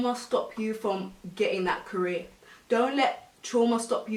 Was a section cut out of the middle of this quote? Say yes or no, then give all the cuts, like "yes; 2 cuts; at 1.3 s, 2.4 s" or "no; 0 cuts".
no; 0 cuts